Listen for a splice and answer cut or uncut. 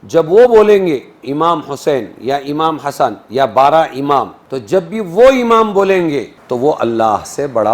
cut